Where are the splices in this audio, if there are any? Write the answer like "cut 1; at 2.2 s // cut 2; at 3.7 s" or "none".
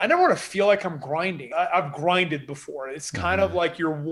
cut 1; at 1.5 s